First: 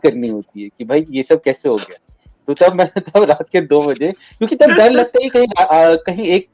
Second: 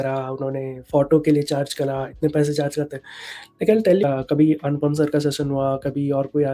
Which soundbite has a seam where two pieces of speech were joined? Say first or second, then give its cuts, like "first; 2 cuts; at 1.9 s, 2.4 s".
second; 1 cut; at 4.0 s